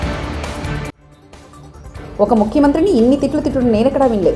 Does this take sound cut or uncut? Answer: uncut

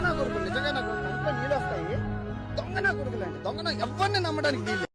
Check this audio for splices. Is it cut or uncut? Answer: uncut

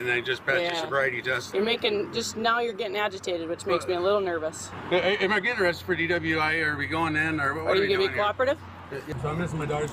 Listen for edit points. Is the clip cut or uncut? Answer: cut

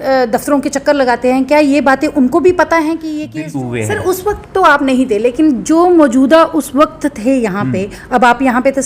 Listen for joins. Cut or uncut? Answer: cut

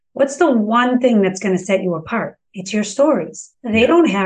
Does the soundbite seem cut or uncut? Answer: uncut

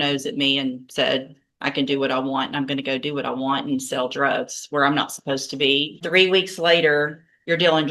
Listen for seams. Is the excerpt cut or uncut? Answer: cut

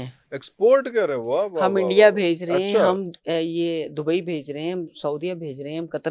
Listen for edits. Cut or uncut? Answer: uncut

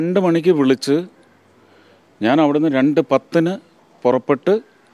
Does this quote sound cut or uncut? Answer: uncut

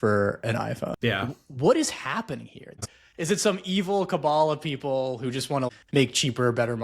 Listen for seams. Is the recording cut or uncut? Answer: cut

